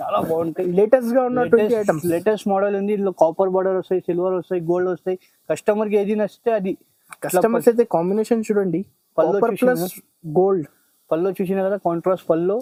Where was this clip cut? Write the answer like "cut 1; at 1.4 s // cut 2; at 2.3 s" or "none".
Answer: none